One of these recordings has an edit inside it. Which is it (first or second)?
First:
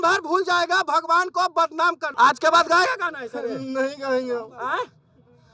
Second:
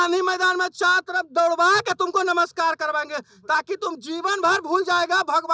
first